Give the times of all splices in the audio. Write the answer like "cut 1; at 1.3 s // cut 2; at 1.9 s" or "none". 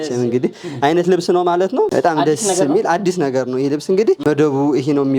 cut 1; at 1.9 s // cut 2; at 4.2 s